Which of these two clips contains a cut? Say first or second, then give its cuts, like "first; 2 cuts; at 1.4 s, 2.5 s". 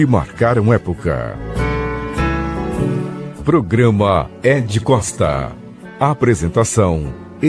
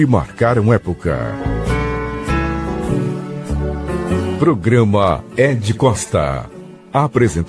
first; 3 cuts; at 1.3 s, 3.4 s, 5.8 s